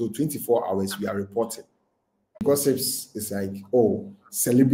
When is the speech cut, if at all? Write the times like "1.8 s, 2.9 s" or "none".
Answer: 2.4 s